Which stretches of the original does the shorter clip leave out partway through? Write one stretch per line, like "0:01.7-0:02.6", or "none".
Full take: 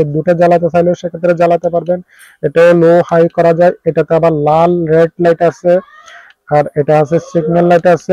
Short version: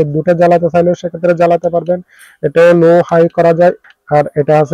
0:03.8-0:06.2